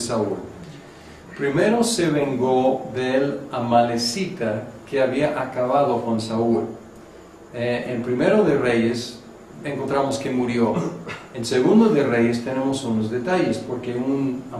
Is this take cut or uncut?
cut